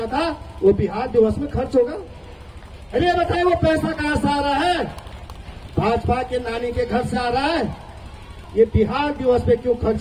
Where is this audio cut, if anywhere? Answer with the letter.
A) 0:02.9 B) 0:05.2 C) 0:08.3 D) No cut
C